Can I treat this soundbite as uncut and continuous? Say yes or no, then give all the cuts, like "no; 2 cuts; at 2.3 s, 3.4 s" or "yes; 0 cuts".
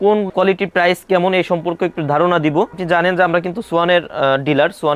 yes; 0 cuts